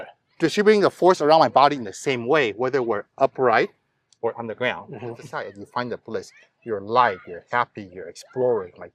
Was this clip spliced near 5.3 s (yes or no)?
yes